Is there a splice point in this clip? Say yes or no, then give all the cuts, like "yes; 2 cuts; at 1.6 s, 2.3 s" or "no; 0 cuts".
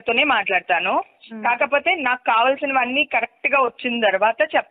no; 0 cuts